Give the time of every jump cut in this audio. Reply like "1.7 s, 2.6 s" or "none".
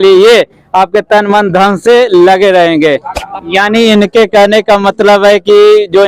3.2 s